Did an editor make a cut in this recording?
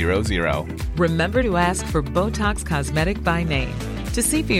no; 0 cuts

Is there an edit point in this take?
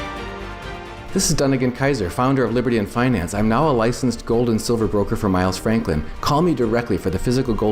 yes; 1 cut; at 0.9 s

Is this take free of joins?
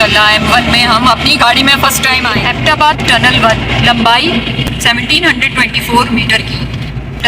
no; 1 cut; at 2.3 s

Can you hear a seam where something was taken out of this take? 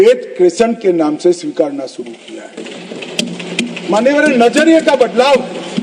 no; 0 cuts

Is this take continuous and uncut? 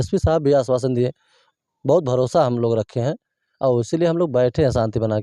yes; 0 cuts

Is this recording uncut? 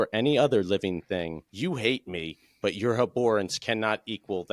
no; 1 cut; at 1.4 s

